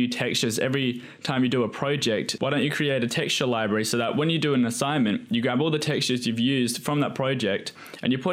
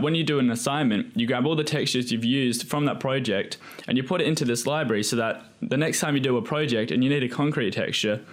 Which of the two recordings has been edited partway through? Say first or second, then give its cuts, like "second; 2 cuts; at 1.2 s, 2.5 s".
first; 1 cut; at 2.3 s